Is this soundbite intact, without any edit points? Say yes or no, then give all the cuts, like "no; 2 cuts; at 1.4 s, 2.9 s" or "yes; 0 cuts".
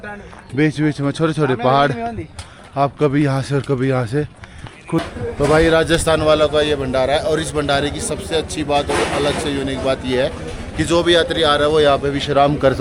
no; 1 cut; at 5.1 s